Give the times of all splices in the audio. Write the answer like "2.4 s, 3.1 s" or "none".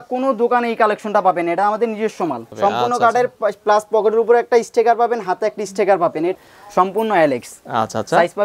2.5 s, 6.3 s